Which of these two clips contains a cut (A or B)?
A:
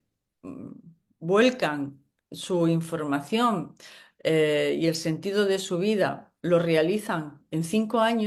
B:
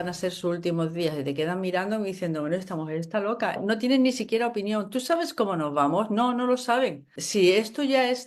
B